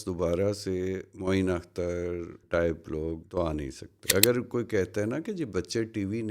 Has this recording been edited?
yes; 1 cut; at 3.9 s

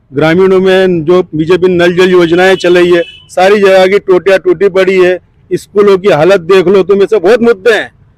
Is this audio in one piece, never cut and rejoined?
yes; 0 cuts

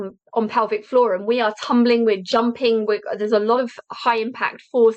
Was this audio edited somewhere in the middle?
no; 0 cuts

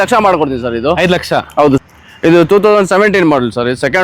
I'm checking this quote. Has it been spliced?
yes; 1 cut; at 1.8 s

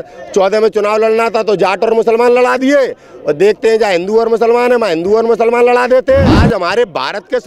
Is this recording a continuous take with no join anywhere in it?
no; 1 cut; at 6.4 s

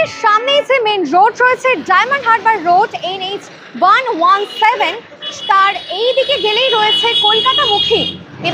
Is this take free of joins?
yes; 0 cuts

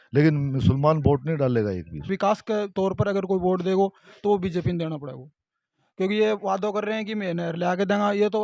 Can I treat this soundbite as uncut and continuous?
no; 1 cut; at 2.1 s

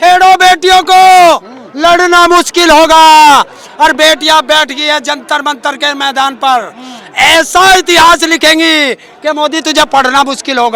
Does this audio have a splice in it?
no; 0 cuts

